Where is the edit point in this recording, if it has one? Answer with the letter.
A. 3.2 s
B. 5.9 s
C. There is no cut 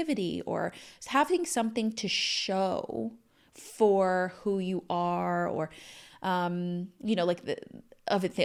C